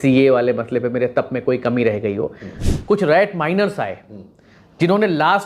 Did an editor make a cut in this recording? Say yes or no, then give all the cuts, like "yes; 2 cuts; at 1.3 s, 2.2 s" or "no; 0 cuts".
yes; 1 cut; at 2.6 s